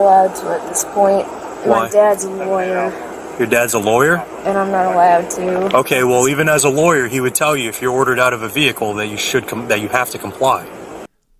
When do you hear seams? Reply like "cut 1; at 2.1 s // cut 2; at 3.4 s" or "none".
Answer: none